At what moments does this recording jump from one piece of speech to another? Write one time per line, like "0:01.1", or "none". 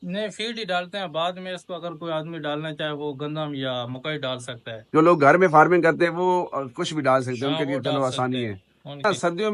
none